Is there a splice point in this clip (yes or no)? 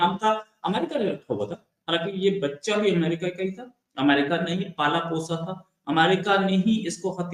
no